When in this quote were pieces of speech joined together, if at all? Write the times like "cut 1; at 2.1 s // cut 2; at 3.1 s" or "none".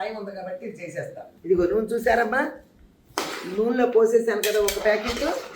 cut 1; at 1.3 s